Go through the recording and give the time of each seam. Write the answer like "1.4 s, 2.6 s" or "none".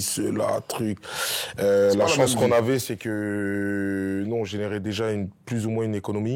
none